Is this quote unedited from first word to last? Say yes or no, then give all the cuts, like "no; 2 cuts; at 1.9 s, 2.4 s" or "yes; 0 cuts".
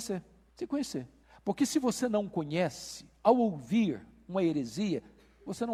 yes; 0 cuts